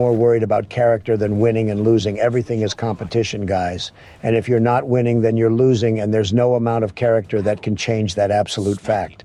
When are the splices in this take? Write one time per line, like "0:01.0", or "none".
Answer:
none